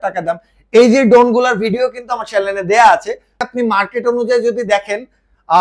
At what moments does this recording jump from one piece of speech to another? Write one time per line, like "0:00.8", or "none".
0:03.5